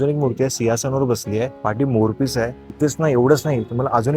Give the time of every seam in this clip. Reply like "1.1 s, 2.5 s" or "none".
1.5 s, 2.6 s